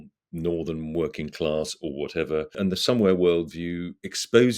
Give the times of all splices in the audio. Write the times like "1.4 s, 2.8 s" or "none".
2.6 s